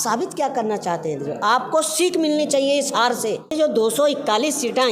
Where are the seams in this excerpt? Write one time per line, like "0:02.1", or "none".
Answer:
0:03.5